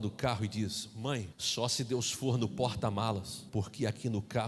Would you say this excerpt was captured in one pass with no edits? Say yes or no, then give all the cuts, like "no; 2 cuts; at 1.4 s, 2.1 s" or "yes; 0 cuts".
no; 2 cuts; at 1.4 s, 3.4 s